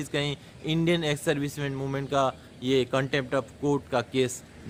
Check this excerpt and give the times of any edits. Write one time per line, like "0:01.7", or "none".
none